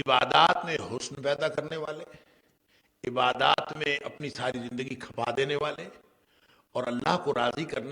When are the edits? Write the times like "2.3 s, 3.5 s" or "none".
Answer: none